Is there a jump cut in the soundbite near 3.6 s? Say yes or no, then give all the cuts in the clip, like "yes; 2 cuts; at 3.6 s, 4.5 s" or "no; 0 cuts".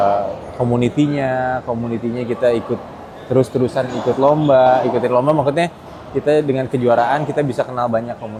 no; 0 cuts